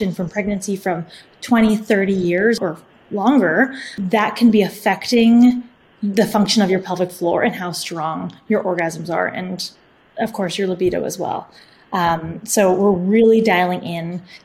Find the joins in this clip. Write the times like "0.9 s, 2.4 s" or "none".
2.6 s, 3.9 s

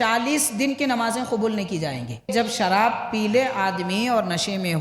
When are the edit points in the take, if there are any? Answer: 2.3 s

